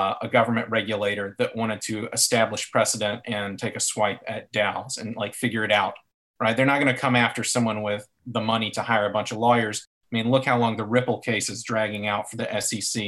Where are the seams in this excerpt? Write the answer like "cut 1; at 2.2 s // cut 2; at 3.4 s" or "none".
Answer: none